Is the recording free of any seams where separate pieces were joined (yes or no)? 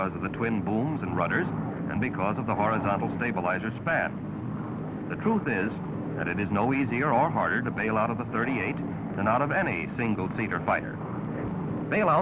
no